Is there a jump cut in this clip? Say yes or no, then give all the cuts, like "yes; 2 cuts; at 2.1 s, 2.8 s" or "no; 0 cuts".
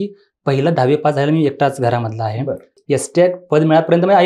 yes; 1 cut; at 2.7 s